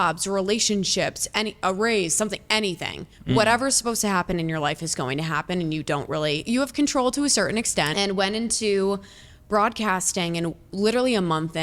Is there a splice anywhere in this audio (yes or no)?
yes